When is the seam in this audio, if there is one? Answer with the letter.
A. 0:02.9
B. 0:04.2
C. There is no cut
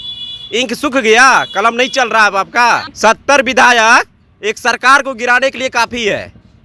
A